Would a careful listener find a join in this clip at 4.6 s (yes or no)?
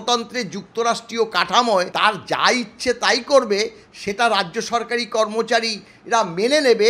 no